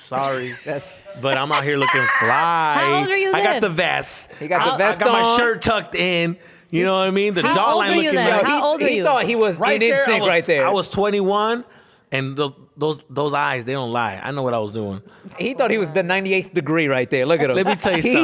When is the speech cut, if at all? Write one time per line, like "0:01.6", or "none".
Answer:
0:15.4

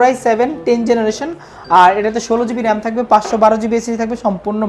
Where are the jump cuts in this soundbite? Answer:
none

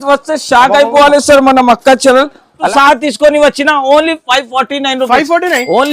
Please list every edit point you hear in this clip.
0:02.6

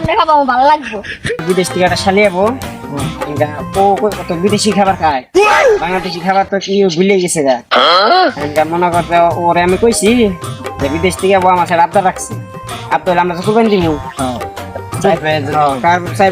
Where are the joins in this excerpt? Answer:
0:01.4

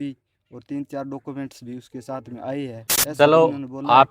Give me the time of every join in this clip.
0:02.9

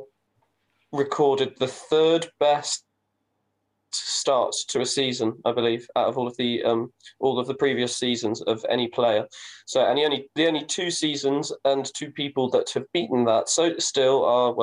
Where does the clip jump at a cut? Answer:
none

